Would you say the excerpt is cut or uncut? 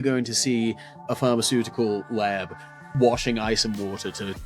cut